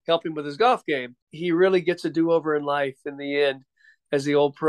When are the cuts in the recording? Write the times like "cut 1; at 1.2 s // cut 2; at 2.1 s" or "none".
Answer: cut 1; at 1.3 s